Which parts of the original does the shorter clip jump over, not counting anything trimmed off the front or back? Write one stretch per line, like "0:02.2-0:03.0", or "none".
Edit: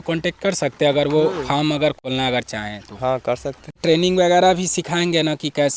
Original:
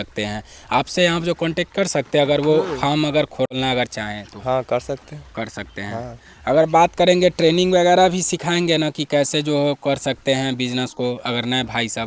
0:03.4-0:03.5
0:05.2-0:07.4